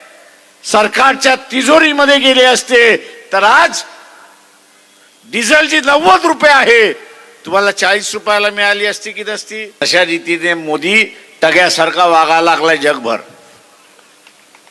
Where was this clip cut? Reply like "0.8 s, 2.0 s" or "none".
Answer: 9.8 s